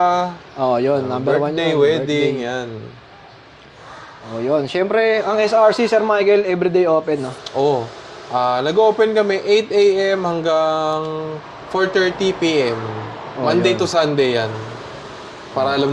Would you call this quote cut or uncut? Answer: uncut